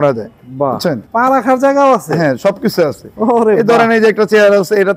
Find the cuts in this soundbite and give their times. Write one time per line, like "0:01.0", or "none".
0:01.1